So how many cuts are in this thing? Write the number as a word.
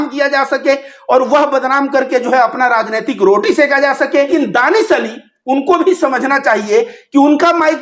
one